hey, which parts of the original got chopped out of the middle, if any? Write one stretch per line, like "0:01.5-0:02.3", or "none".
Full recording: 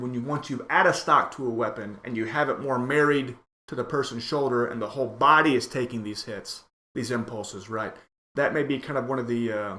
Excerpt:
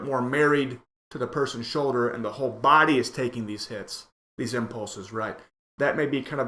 none